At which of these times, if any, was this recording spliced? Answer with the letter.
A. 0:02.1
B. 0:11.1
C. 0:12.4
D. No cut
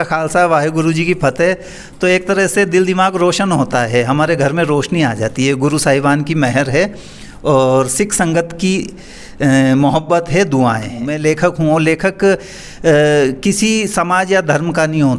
B